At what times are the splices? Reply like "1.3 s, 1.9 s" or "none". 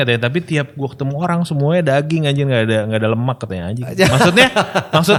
none